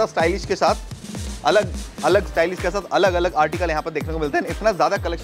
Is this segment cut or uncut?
uncut